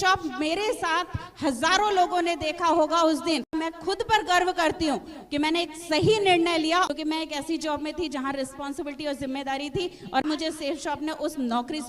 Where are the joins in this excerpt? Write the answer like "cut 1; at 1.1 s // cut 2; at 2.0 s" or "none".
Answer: cut 1; at 3.5 s // cut 2; at 6.9 s // cut 3; at 10.2 s